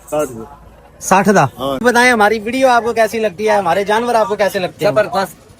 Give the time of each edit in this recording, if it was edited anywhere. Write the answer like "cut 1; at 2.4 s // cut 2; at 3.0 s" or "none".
cut 1; at 1.8 s